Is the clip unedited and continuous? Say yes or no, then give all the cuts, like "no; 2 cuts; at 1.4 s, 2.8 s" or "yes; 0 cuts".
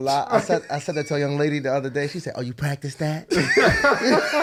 yes; 0 cuts